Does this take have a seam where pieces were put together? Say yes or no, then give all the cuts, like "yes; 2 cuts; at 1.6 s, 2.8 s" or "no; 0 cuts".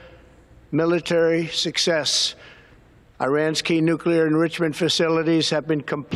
no; 0 cuts